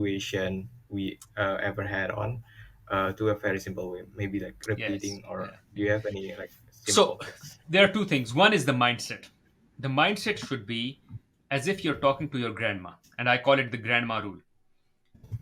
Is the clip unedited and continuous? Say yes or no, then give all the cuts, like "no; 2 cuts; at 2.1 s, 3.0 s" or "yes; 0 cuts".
yes; 0 cuts